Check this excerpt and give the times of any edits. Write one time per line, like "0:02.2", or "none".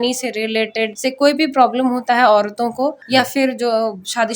0:00.9
0:03.0